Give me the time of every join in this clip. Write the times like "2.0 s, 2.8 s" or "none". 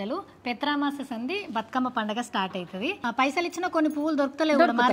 3.0 s